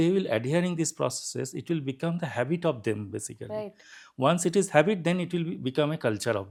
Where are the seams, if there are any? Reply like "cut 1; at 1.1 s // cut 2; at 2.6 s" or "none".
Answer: none